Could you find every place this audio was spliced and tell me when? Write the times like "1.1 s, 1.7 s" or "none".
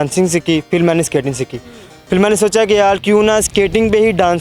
none